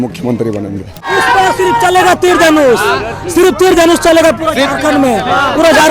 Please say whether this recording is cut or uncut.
cut